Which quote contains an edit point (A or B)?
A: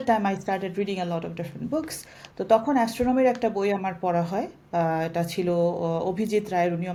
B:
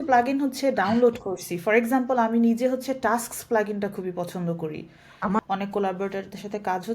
B